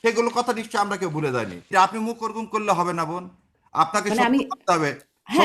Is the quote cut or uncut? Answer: cut